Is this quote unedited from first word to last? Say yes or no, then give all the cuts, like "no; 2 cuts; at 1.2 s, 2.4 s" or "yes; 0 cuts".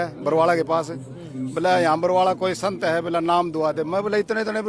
yes; 0 cuts